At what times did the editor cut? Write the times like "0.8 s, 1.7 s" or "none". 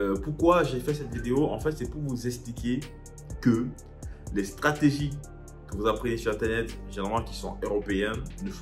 none